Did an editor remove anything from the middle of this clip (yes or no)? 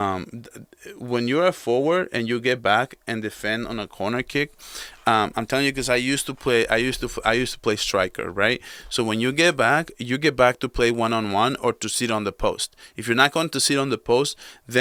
no